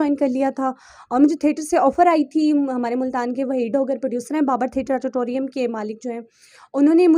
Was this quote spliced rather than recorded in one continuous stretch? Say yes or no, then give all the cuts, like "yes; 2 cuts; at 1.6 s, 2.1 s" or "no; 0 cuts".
no; 0 cuts